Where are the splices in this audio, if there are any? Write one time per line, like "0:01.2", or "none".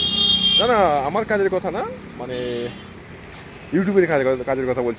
none